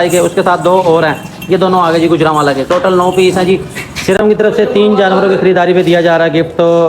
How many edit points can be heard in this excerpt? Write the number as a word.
one